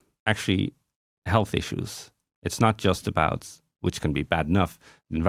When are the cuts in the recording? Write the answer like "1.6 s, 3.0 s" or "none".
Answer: none